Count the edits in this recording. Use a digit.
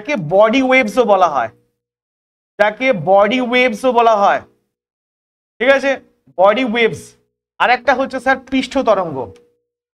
0